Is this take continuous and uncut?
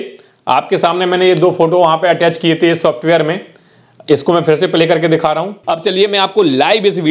no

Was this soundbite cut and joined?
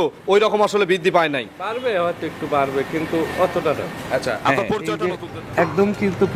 yes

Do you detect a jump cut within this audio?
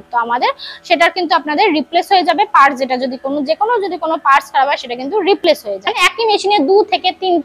yes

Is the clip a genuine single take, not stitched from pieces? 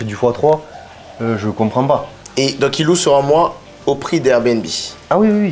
no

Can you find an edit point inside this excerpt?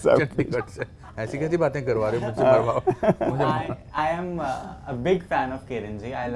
no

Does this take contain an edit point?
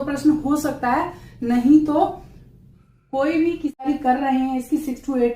yes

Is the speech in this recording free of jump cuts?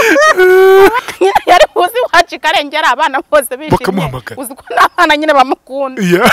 no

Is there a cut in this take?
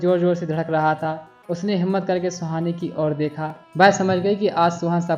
yes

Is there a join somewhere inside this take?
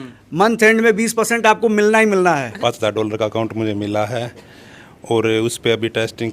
yes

